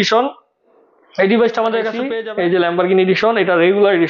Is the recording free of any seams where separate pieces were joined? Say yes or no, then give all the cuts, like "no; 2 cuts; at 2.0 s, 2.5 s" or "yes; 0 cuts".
no; 1 cut; at 2.1 s